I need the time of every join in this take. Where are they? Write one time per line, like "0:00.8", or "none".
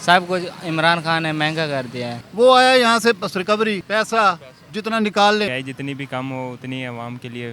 0:02.2
0:03.8
0:05.5